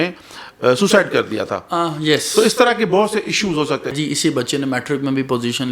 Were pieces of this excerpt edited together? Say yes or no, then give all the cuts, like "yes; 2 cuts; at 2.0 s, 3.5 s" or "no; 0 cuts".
yes; 1 cut; at 4.0 s